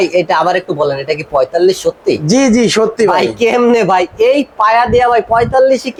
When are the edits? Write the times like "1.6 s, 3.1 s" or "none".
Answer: none